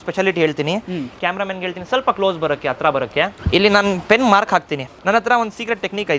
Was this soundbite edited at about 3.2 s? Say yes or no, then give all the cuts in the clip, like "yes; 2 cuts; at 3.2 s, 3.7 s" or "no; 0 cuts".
no; 2 cuts; at 1.1 s, 4.9 s